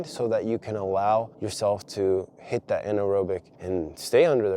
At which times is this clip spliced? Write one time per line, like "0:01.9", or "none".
0:01.4
0:03.5